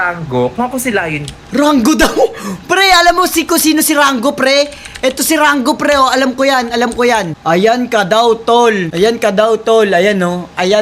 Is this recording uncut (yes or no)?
yes